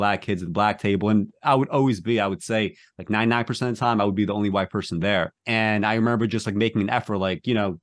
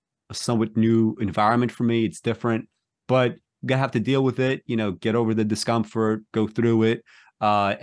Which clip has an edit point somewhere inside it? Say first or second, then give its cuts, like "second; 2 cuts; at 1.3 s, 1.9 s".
first; 1 cut; at 5.4 s